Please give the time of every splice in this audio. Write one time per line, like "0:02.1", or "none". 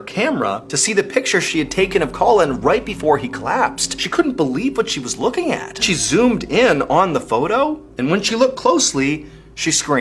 0:04.0
0:05.8